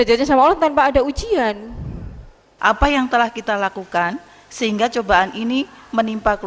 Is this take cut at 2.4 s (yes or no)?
yes